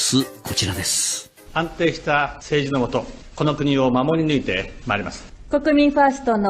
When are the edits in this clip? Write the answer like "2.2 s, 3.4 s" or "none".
5.3 s